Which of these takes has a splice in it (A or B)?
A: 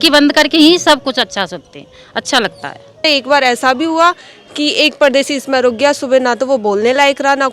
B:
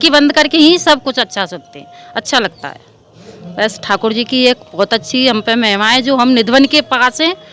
A